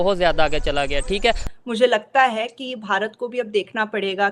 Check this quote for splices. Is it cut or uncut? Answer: cut